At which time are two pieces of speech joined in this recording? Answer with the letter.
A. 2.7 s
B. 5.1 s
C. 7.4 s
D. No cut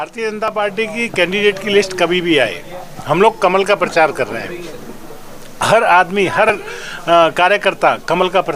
D